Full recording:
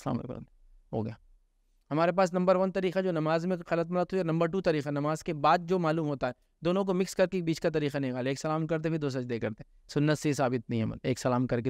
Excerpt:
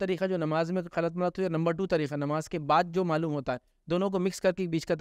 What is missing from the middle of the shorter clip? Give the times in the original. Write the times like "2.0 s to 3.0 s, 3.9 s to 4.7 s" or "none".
none